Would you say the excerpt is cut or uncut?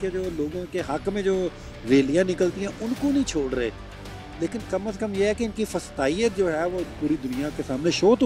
uncut